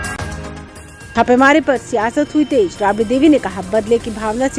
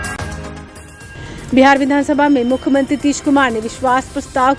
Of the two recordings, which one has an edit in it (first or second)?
first